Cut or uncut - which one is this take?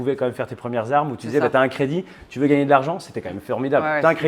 uncut